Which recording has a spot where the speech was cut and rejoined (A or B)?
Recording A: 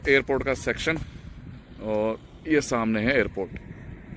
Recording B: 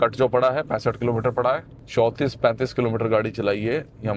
B